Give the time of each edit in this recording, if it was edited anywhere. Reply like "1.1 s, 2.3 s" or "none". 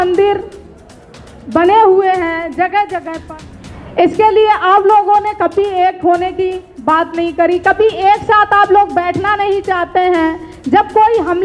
3.2 s